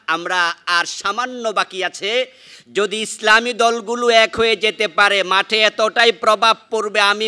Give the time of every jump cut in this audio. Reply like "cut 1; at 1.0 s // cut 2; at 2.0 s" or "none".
none